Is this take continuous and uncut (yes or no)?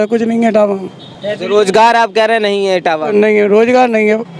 yes